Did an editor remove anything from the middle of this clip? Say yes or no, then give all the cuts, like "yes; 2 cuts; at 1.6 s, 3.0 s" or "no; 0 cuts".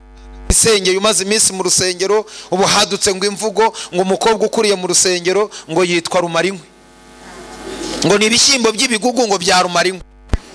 no; 0 cuts